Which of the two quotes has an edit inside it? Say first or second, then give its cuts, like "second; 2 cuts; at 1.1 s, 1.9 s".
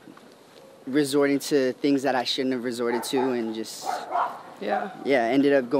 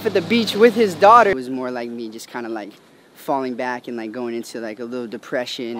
second; 1 cut; at 1.3 s